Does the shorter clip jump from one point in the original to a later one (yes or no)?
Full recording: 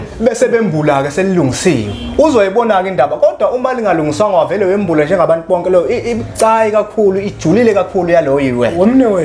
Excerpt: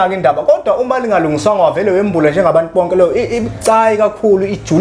no